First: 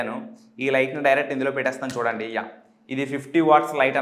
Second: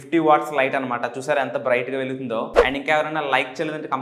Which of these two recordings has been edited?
second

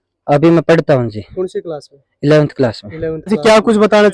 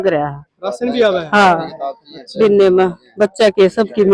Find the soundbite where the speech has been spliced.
first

